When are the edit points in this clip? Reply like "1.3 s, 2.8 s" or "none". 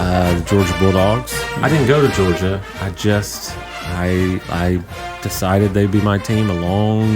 none